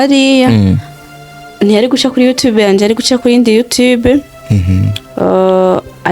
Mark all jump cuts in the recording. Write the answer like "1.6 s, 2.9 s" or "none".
none